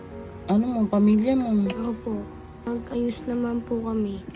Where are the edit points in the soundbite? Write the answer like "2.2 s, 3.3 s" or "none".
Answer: 2.7 s